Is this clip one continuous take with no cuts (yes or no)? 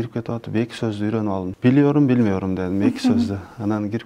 no